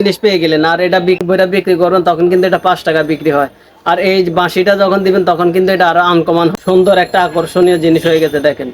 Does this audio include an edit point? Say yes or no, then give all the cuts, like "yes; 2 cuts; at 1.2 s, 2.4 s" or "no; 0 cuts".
yes; 2 cuts; at 1.2 s, 6.6 s